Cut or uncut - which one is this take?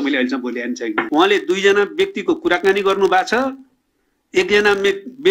cut